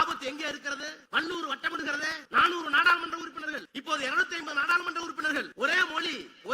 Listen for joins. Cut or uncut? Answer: cut